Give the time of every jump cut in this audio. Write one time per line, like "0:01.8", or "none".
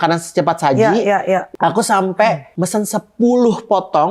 0:01.5
0:02.5